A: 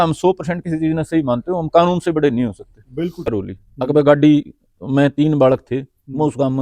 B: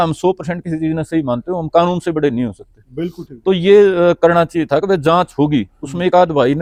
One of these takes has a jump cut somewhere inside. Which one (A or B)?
A